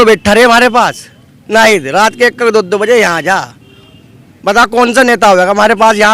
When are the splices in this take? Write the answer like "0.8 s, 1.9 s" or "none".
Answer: none